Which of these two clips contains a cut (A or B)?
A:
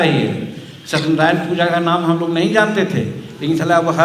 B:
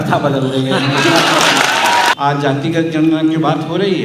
B